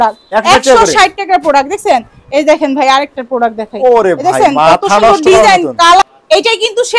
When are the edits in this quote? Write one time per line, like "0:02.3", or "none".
0:06.0